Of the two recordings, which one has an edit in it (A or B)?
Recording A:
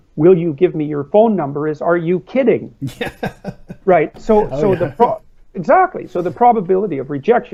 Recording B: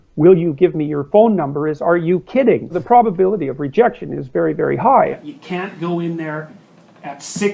B